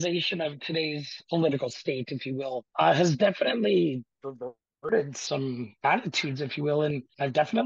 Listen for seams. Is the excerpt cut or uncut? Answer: uncut